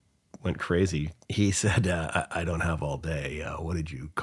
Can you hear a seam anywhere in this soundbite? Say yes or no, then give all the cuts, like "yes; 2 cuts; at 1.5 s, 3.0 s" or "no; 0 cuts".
yes; 1 cut; at 1.2 s